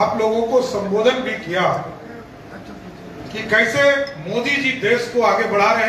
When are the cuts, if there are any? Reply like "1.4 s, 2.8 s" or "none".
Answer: none